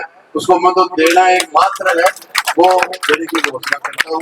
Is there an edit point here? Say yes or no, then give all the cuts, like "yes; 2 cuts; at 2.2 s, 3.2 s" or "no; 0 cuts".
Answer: no; 0 cuts